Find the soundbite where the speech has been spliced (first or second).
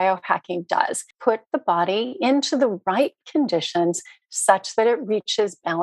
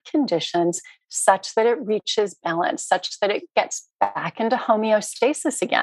first